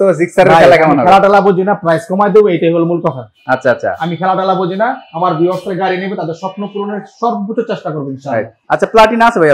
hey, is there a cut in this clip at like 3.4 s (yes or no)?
no